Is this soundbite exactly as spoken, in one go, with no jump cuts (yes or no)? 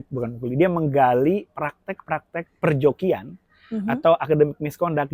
yes